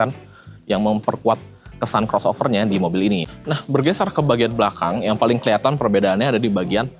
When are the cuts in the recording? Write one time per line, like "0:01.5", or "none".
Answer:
0:03.3